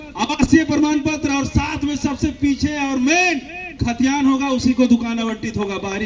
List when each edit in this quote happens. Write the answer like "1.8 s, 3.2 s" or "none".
none